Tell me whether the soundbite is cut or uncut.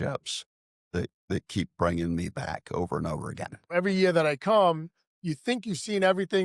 cut